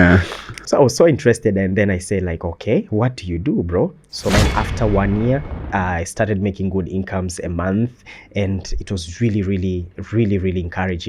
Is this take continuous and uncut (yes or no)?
no